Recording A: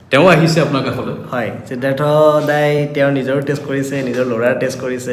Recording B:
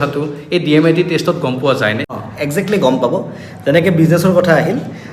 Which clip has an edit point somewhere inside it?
B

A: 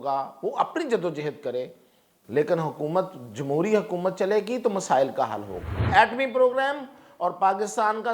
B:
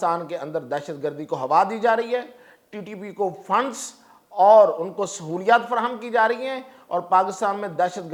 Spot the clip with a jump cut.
A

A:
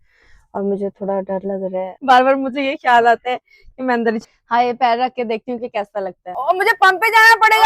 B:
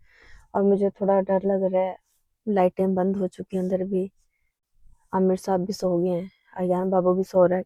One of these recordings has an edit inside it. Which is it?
A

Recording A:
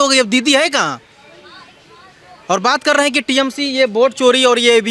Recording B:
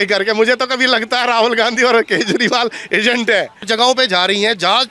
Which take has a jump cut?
B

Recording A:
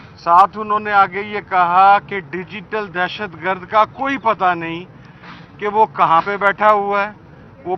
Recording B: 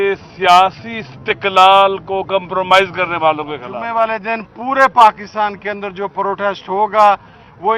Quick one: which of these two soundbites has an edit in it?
B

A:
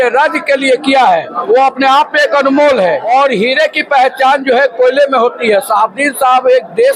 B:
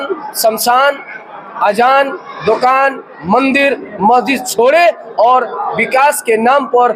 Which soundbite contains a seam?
A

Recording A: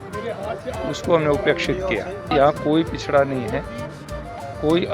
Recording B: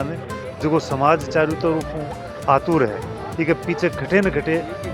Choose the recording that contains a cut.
A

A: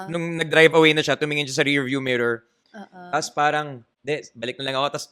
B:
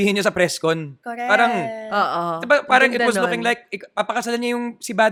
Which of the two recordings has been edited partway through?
A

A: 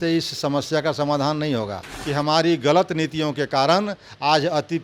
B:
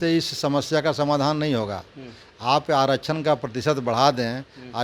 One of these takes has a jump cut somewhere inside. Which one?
A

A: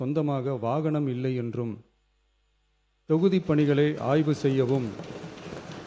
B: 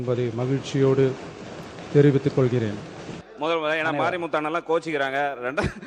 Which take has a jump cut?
B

